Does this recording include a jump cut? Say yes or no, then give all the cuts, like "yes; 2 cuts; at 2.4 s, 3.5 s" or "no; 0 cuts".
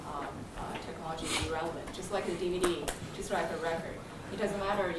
yes; 1 cut; at 3.6 s